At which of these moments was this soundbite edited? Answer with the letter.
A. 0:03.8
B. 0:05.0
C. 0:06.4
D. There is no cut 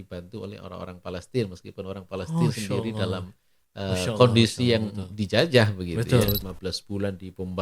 C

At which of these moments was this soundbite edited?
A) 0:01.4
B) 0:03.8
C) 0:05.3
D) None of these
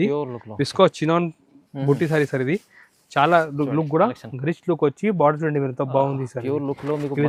D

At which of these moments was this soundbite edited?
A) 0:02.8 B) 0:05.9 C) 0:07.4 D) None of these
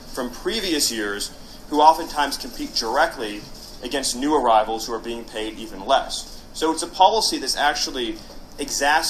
D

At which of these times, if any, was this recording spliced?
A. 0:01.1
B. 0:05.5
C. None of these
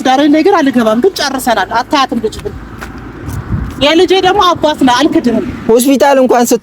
B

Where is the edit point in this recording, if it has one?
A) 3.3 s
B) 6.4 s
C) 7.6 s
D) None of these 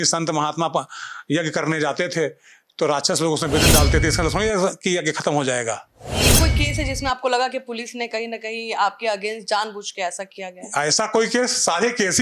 B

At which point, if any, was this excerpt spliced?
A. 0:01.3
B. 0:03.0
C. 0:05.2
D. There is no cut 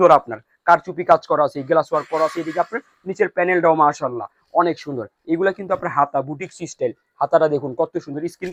D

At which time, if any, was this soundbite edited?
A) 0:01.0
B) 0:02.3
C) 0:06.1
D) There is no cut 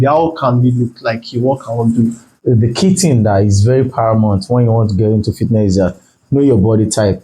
B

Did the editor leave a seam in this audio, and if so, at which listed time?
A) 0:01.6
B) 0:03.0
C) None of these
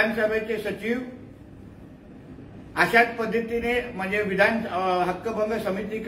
C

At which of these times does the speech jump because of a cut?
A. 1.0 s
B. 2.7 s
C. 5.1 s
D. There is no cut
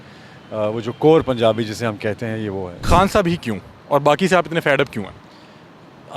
B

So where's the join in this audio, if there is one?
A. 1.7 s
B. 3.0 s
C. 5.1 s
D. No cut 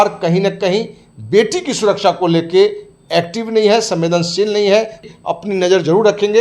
C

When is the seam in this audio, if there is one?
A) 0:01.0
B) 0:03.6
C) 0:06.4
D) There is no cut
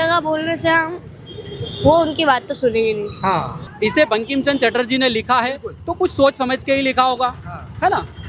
B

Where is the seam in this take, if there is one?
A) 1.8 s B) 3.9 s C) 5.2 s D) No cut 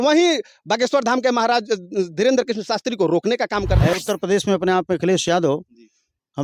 B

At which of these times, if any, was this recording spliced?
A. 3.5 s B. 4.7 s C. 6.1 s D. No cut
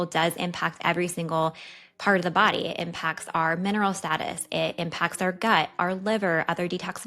D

